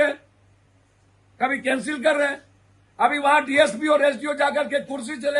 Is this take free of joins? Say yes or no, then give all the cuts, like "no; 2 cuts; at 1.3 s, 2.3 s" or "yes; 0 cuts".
yes; 0 cuts